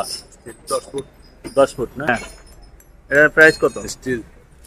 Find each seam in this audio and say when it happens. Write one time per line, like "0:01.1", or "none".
0:02.1